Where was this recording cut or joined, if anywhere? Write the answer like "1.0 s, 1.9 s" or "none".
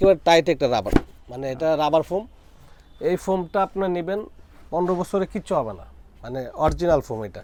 none